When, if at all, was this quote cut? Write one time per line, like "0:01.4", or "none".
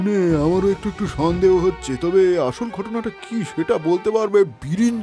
none